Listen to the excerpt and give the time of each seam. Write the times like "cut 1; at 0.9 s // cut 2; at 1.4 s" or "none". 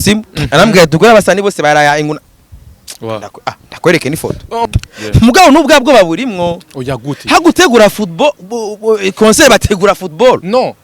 cut 1; at 4.7 s